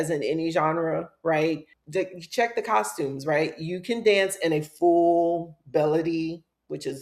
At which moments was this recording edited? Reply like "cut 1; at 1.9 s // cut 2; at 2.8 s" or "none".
cut 1; at 1.7 s